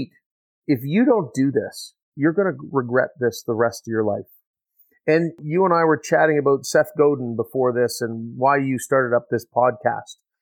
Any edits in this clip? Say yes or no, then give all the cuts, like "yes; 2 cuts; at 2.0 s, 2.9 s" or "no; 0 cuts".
yes; 1 cut; at 5.4 s